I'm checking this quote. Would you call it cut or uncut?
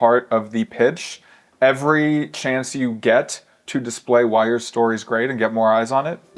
uncut